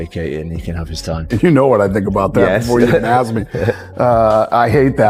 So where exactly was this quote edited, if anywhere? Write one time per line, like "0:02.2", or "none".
none